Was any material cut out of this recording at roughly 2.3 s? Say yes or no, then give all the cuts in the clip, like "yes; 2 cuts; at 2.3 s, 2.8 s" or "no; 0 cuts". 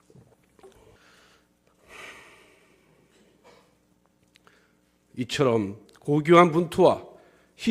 no; 1 cut; at 0.9 s